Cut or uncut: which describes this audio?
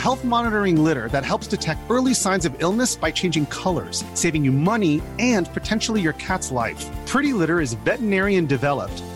uncut